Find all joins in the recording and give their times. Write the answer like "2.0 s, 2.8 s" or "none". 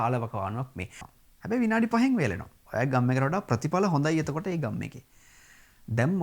1.0 s